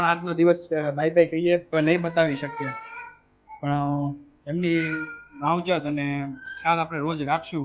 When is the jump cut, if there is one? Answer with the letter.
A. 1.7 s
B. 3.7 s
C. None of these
A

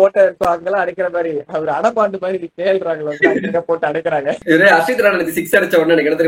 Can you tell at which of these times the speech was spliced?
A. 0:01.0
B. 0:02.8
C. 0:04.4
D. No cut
C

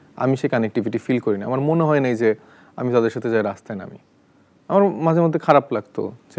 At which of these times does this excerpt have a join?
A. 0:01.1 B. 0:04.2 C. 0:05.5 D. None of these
D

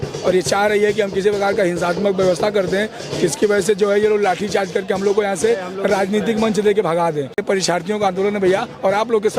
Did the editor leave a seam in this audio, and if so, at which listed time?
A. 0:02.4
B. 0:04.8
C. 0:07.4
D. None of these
C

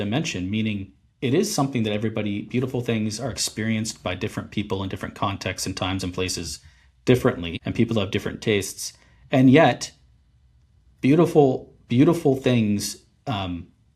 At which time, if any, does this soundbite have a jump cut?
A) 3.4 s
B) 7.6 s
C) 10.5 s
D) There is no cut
B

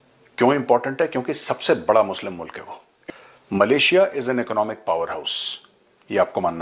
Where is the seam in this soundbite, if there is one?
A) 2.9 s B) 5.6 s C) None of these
A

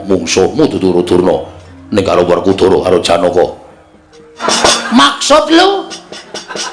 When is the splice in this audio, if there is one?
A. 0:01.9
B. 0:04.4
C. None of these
B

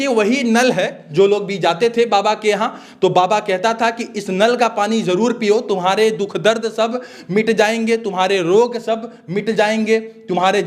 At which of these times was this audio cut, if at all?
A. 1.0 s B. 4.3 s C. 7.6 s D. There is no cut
A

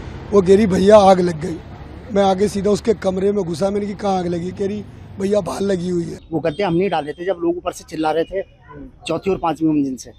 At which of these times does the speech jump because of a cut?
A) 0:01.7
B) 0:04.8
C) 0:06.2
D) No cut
C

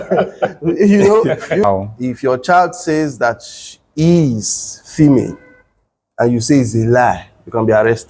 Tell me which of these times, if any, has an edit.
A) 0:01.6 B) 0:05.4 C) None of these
A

